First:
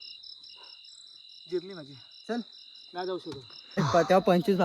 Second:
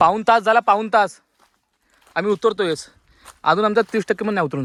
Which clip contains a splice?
first; 1 cut; at 3.7 s

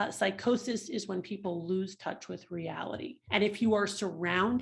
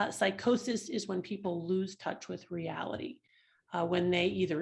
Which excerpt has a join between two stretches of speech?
first; 1 cut; at 3.2 s

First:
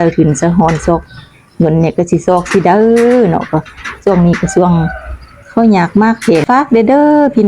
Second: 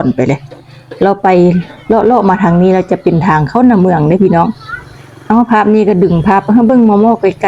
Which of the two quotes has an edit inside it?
first; 1 cut; at 6.4 s

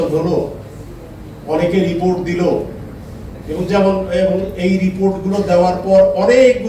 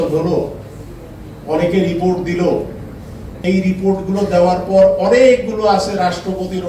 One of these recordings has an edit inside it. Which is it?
second; 1 cut; at 3.3 s

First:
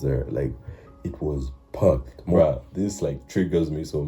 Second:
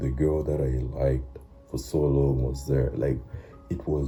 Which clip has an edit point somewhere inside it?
first; 1 cut; at 2.4 s

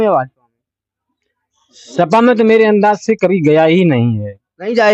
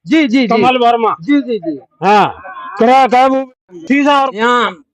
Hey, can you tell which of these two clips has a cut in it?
second; 1 cut; at 3.9 s

